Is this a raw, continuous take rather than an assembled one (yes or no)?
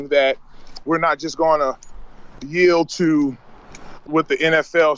no